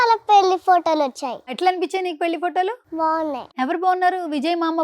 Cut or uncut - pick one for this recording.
cut